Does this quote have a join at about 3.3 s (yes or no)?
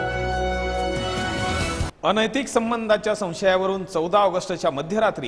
no